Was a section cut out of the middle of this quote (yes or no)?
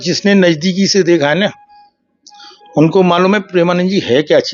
no